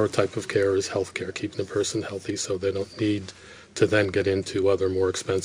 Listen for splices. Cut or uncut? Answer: uncut